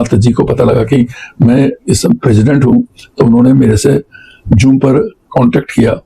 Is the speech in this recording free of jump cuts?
yes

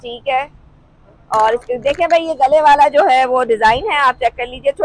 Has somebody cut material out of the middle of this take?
no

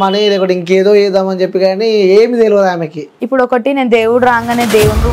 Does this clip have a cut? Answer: yes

